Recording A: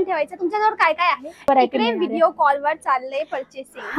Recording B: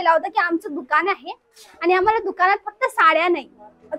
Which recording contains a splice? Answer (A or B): A